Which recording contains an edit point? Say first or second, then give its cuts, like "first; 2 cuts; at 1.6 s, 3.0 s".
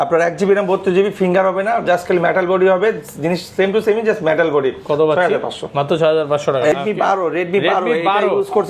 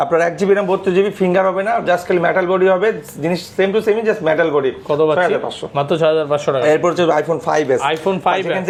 first; 1 cut; at 6.7 s